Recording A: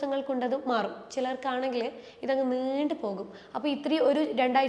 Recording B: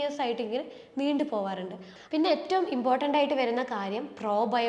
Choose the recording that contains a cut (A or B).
B